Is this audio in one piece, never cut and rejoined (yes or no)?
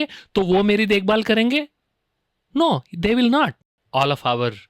no